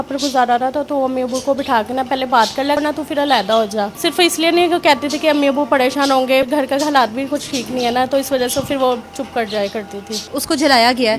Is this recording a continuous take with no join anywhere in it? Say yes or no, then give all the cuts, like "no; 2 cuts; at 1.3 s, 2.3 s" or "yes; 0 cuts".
no; 4 cuts; at 2.8 s, 3.9 s, 6.5 s, 10.3 s